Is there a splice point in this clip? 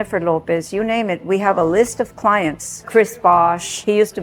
yes; 1 cut; at 2.8 s

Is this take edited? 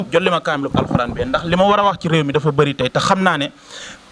no; 0 cuts

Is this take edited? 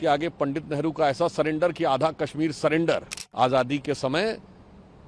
yes; 1 cut; at 3.2 s

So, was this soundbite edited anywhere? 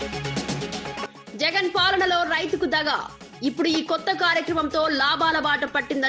yes; 1 cut; at 1.0 s

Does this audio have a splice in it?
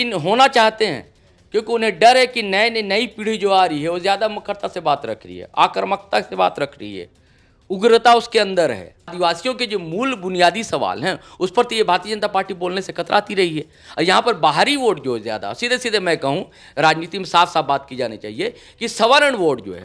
yes; 1 cut; at 9.1 s

